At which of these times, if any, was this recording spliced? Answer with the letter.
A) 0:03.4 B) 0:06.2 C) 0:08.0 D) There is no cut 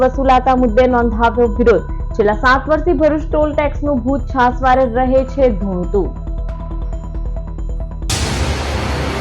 C